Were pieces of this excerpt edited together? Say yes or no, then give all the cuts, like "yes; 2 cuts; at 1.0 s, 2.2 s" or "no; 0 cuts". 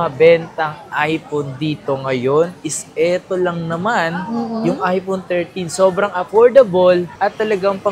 no; 0 cuts